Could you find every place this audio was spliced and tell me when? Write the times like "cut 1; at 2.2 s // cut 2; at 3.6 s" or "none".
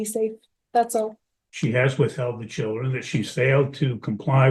cut 1; at 1.3 s